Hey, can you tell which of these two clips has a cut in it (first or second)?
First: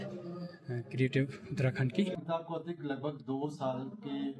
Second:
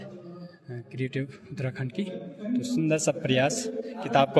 first